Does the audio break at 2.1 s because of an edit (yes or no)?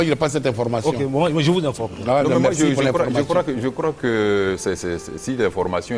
no